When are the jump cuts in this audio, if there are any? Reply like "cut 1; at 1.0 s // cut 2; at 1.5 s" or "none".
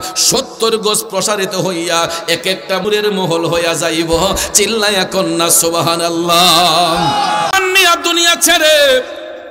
cut 1; at 7.5 s